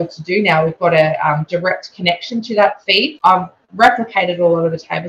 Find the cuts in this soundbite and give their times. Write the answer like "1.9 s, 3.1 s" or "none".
3.1 s